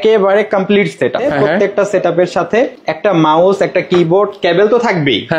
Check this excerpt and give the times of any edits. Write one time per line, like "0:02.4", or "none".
0:01.2
0:02.8